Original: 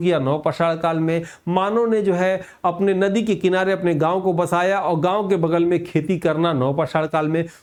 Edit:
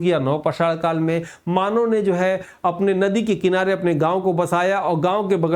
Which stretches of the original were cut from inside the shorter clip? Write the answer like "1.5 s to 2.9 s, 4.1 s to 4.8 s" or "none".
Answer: none

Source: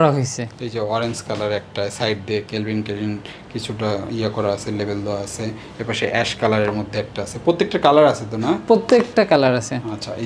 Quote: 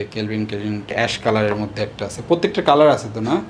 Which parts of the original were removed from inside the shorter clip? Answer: 3.3 s to 6.1 s

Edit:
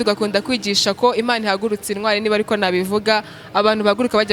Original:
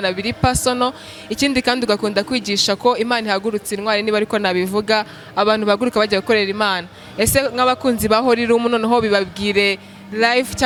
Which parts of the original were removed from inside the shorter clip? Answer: none

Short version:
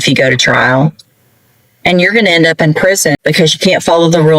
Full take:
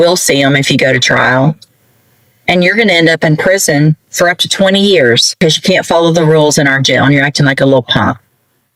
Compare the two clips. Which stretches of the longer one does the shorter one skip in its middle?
3.8 s to 5.2 s

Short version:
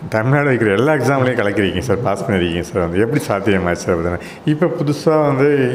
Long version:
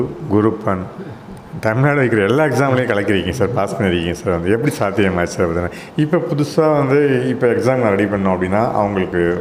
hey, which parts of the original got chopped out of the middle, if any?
none

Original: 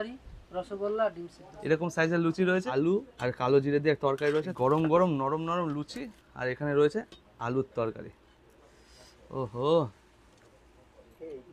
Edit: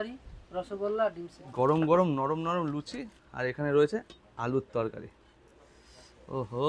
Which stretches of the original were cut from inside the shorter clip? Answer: 1.5 s to 4.5 s

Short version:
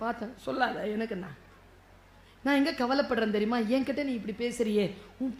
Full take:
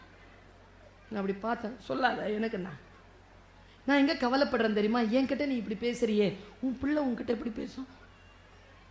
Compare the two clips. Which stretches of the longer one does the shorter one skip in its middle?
none

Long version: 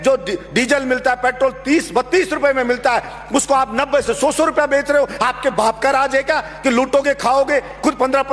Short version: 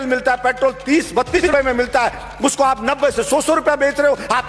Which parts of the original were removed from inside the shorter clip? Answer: 2.2 s to 2.3 s

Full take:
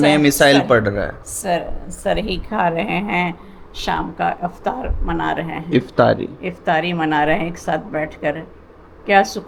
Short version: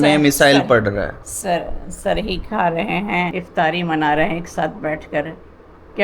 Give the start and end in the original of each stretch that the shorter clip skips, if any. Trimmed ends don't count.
3.4 s to 6.5 s

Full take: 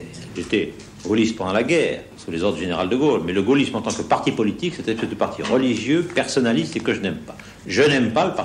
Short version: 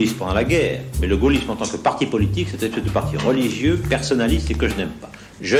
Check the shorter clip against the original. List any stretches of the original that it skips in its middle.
2.2 s to 3.3 s

